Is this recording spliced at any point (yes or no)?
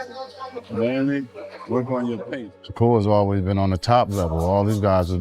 yes